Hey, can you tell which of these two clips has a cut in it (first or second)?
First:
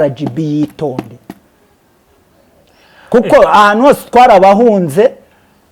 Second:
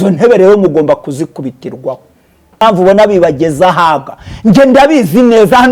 second